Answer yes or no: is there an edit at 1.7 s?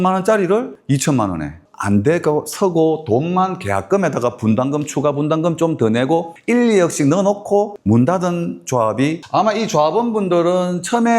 yes